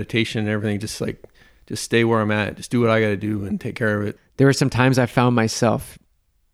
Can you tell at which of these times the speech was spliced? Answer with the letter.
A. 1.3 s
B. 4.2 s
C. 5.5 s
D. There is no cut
B